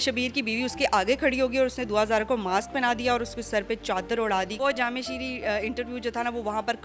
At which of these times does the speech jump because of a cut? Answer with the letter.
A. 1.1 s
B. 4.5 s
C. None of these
B